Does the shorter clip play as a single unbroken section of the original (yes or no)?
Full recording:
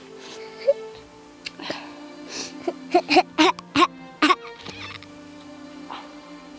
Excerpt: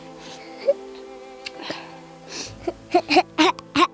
yes